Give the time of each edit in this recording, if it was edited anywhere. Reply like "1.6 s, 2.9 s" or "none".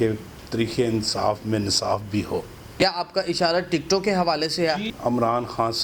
2.8 s, 4.9 s